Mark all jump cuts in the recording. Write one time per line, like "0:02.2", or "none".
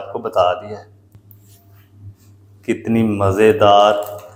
none